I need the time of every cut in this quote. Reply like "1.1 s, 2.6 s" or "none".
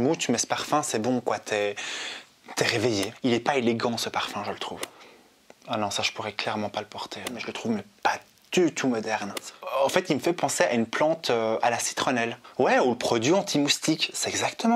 3.1 s, 4.9 s, 7.5 s, 9.5 s, 12.4 s